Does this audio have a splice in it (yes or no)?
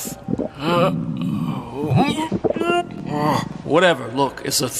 no